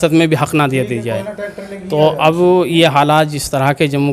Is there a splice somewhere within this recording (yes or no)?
no